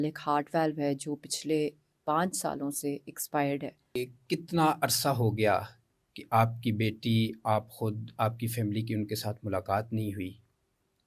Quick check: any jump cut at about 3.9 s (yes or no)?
yes